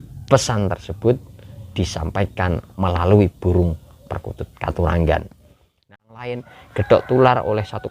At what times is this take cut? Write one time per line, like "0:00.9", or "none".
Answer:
0:05.8